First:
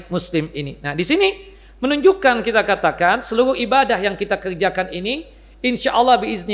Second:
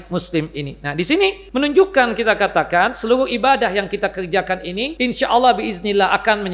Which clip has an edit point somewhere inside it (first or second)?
second